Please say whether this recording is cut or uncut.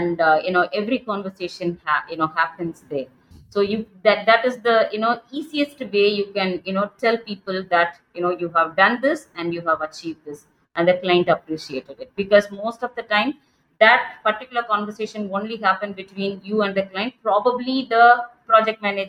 uncut